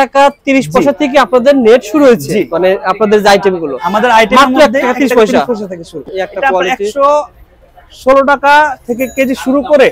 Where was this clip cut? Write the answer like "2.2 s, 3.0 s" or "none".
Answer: 6.0 s